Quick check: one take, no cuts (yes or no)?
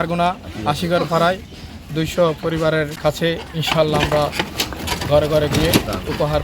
no